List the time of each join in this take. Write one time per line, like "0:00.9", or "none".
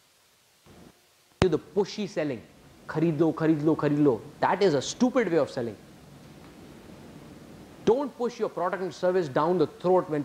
none